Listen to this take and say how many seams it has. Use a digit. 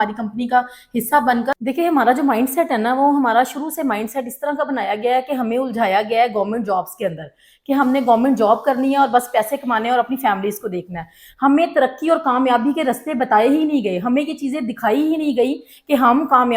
1